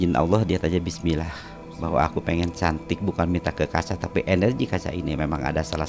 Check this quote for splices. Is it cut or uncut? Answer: uncut